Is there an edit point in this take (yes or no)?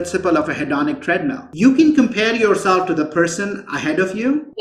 yes